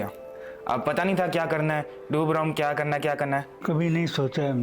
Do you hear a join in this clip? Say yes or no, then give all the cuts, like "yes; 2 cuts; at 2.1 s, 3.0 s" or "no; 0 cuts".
yes; 1 cut; at 3.5 s